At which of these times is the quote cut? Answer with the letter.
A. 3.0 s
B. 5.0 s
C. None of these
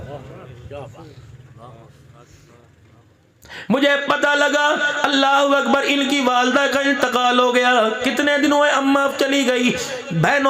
A